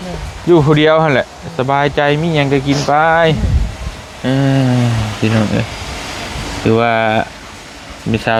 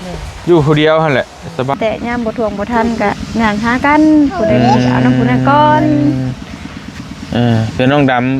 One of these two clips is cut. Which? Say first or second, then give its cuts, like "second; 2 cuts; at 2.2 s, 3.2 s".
second; 1 cut; at 1.8 s